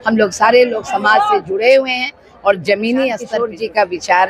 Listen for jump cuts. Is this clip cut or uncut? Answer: cut